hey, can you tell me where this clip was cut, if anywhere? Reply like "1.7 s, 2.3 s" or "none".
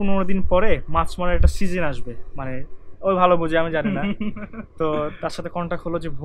none